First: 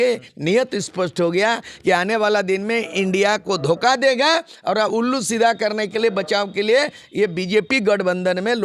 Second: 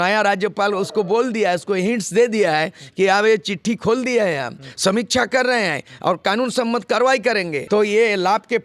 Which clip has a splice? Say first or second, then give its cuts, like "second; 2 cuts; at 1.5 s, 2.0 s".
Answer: second; 1 cut; at 7.6 s